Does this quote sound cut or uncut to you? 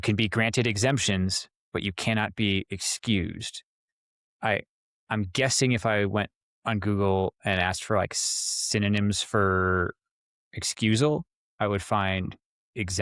uncut